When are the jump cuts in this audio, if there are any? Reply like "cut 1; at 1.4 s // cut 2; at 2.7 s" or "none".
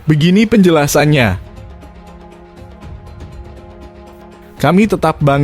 cut 1; at 1.7 s // cut 2; at 4.6 s